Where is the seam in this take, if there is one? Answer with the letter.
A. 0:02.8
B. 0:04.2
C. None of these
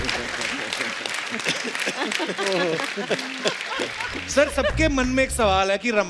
B